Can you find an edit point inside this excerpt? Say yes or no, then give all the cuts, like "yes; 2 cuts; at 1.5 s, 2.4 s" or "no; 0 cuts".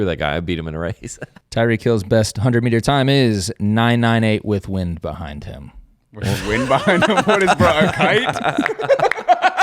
yes; 1 cut; at 1.3 s